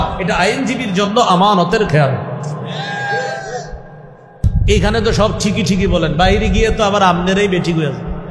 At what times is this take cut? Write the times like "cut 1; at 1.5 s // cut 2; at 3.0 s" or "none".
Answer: cut 1; at 4.5 s